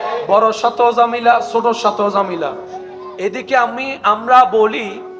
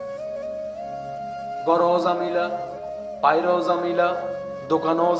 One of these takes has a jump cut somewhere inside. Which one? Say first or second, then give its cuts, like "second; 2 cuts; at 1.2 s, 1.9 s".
second; 1 cut; at 1.6 s